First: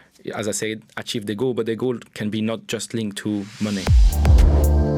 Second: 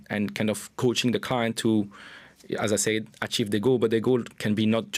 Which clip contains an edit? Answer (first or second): first